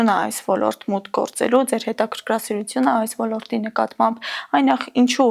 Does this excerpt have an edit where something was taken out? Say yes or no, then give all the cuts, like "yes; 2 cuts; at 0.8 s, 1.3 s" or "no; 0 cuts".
no; 0 cuts